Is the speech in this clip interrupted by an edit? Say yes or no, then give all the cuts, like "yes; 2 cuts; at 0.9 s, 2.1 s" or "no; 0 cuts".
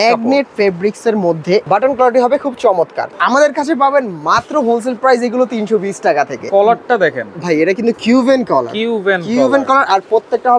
yes; 3 cuts; at 1.6 s, 3.2 s, 6.5 s